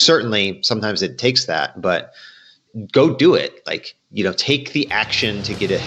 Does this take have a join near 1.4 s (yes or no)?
no